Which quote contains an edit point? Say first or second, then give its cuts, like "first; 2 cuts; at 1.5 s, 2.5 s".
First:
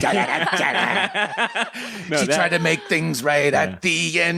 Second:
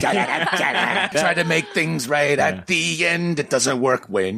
second; 1 cut; at 1.1 s